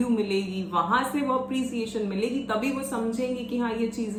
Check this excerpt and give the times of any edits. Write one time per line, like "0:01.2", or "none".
none

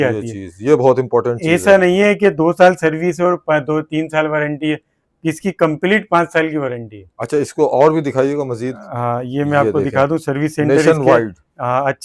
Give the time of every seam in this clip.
none

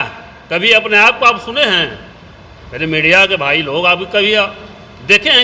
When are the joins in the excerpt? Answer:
none

